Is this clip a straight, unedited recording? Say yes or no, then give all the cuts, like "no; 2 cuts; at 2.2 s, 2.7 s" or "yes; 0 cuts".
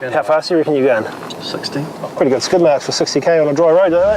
no; 1 cut; at 2.0 s